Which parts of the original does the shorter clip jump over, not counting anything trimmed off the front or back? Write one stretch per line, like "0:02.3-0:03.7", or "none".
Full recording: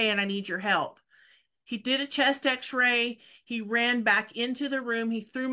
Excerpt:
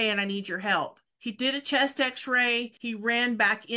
0:01.1-0:01.5
0:03.2-0:03.4